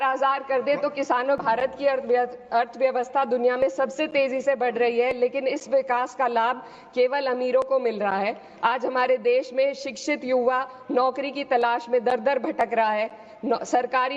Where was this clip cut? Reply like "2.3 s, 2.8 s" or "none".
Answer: 1.4 s